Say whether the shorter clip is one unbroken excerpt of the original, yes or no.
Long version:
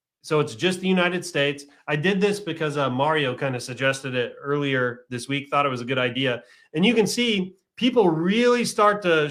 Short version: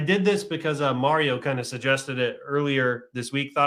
yes